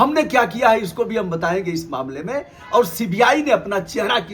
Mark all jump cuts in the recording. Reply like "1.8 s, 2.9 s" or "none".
none